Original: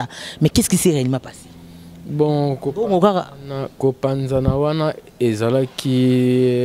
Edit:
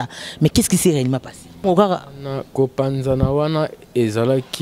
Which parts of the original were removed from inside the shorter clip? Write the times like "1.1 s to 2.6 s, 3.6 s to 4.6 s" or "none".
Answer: 1.6 s to 2.9 s